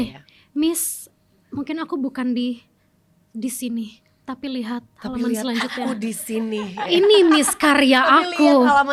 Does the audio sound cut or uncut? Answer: uncut